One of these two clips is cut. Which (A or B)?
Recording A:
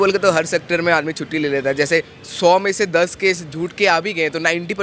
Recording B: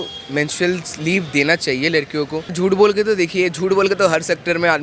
B